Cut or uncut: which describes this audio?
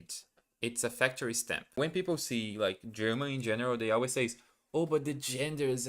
cut